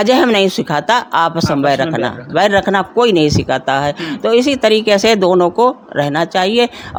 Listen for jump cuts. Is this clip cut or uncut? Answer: uncut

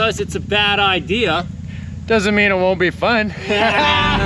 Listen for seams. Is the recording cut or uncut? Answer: uncut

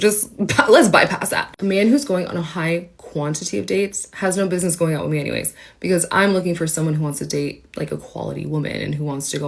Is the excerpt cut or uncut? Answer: uncut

